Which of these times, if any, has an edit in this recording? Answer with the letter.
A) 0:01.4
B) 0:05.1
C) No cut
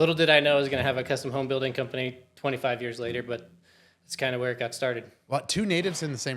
B